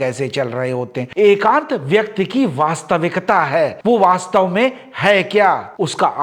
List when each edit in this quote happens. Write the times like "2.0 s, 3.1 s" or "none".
1.1 s